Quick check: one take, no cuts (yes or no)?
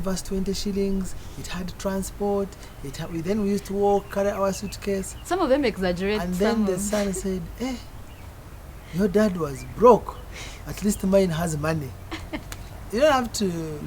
no